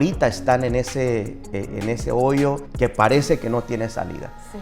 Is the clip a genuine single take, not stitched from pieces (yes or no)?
no